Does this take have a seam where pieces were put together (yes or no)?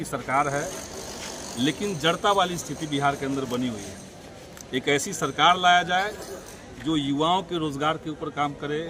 no